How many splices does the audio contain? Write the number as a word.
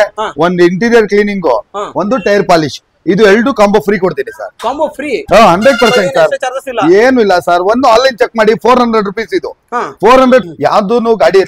one